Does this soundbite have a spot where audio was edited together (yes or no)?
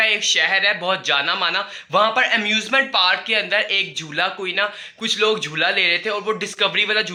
no